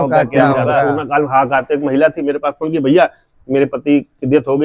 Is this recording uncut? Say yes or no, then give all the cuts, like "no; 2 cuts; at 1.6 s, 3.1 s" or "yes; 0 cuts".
no; 1 cut; at 0.9 s